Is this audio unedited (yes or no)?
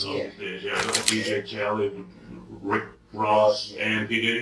no